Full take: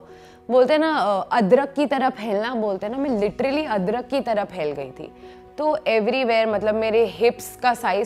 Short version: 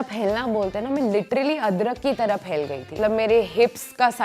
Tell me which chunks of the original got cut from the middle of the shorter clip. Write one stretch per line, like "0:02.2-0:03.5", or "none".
0:05.1-0:06.6